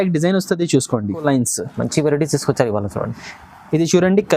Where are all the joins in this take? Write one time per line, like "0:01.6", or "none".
0:01.2